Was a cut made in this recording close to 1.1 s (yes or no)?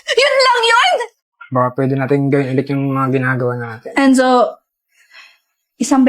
yes